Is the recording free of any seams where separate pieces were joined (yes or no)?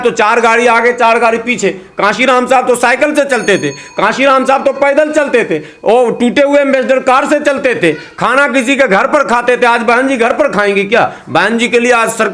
yes